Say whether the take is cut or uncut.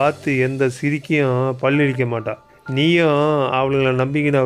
uncut